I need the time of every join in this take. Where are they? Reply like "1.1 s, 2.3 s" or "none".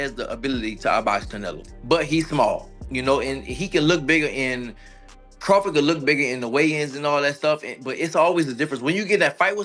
none